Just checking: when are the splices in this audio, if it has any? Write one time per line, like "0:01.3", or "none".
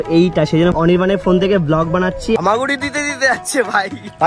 0:02.4